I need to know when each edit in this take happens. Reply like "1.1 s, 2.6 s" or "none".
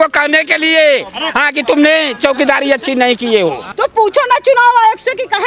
3.7 s